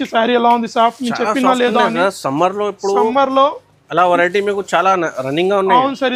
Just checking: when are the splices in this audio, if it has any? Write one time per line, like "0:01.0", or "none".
none